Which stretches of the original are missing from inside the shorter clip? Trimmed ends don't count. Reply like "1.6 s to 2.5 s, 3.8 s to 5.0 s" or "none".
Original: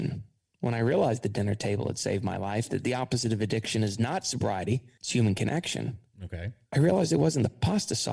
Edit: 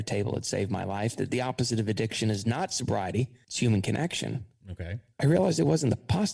none